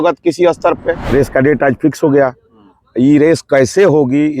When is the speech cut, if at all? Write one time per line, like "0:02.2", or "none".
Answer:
0:01.0